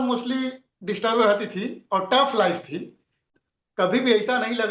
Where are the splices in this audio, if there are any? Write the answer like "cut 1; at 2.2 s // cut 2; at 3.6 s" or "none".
cut 1; at 3.3 s